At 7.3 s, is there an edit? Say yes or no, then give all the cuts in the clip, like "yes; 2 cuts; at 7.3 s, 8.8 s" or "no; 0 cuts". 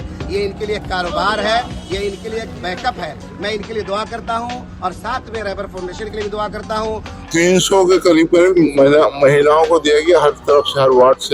yes; 1 cut; at 7.3 s